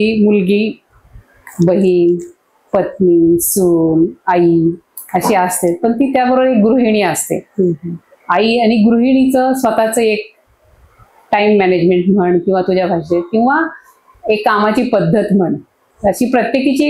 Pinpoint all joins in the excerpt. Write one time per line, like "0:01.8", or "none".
none